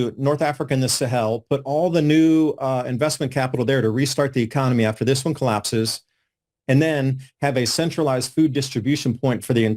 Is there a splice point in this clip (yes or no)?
no